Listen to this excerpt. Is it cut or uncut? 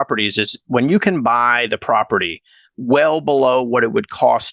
uncut